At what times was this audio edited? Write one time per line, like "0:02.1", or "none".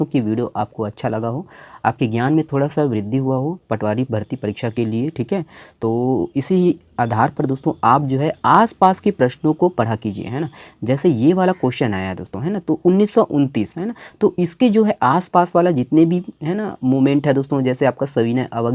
none